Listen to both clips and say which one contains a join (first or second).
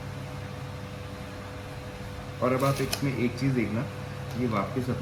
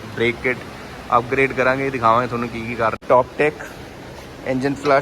second